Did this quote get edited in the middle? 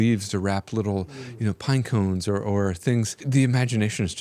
yes; 1 cut; at 3.2 s

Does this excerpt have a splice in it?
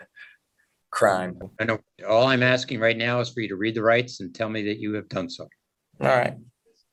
no; 0 cuts

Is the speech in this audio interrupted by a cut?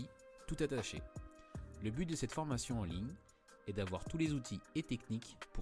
no; 0 cuts

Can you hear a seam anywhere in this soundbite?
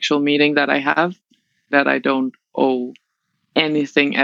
yes; 1 cut; at 1.7 s

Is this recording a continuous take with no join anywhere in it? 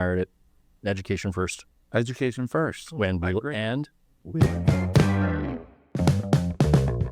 no; 1 cut; at 4.4 s

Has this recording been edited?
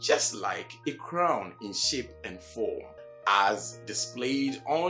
yes; 1 cut; at 3.0 s

